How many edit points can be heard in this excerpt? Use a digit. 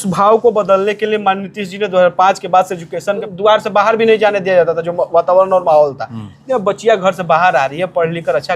1